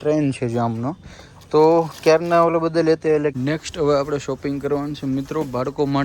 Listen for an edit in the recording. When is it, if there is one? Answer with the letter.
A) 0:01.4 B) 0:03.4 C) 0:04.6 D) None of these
B